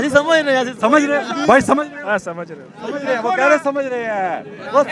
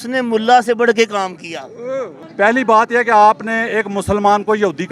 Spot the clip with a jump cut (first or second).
second